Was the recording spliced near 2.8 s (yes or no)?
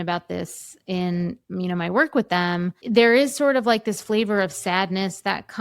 yes